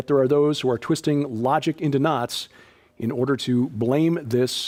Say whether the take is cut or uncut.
uncut